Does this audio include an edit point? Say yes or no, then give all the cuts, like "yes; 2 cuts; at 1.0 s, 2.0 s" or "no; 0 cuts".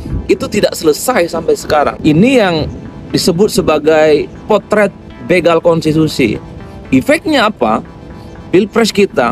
yes; 1 cut; at 2.0 s